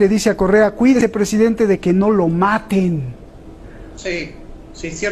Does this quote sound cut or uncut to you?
cut